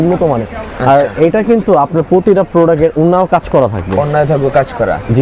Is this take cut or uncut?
uncut